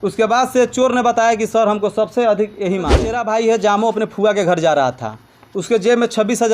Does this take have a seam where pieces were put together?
yes; 1 cut; at 3.1 s

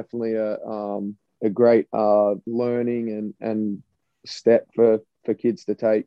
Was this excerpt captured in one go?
no; 2 cuts; at 1.2 s, 2.4 s

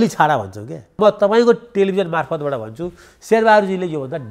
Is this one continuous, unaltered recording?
no; 1 cut; at 1.0 s

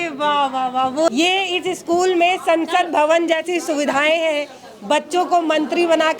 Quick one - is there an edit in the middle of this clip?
yes; 1 cut; at 1.1 s

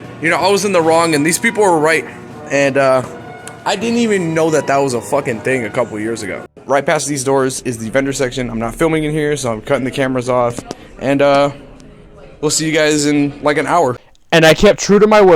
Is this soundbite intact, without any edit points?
no; 1 cut; at 6.5 s

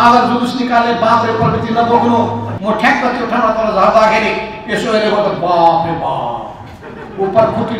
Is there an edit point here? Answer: yes; 1 cut; at 2.5 s

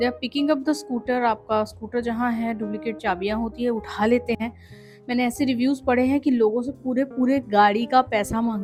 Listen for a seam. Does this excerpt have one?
no; 0 cuts

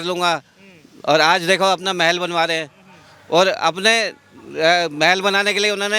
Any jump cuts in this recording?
no; 0 cuts

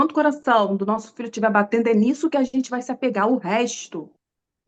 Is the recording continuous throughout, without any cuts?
yes; 0 cuts

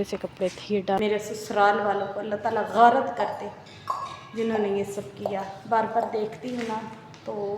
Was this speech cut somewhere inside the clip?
yes; 1 cut; at 1.0 s

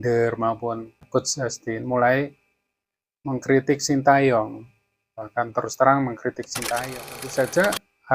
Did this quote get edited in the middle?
yes; 1 cut; at 6.6 s

